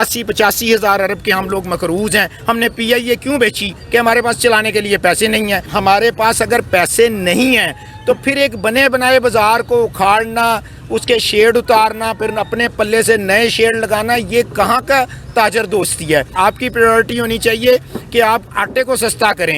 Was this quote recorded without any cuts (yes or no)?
no